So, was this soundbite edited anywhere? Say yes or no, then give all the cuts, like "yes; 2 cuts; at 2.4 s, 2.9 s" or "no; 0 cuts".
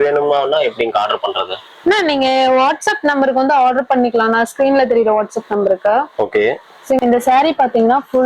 yes; 1 cut; at 7.0 s